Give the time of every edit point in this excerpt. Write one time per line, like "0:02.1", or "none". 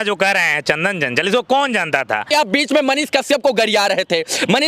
0:02.3